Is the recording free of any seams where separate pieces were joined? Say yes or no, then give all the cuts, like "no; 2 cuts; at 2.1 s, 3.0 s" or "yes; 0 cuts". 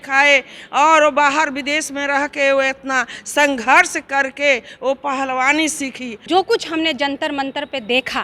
no; 1 cut; at 6.2 s